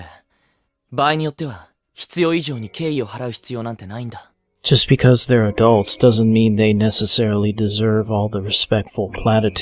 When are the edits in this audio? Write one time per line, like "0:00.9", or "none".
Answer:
0:07.1